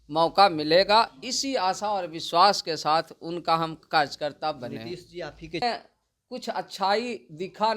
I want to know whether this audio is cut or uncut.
cut